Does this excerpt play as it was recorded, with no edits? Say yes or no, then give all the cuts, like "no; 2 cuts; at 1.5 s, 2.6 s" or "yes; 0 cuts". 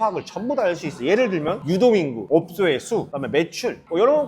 yes; 0 cuts